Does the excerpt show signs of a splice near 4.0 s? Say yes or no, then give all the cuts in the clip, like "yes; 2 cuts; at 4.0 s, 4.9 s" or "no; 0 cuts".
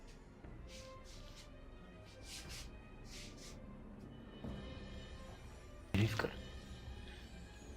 no; 1 cut; at 5.9 s